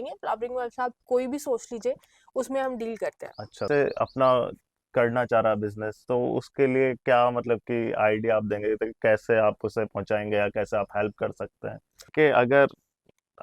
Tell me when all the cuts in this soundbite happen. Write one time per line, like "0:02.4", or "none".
0:03.6
0:12.1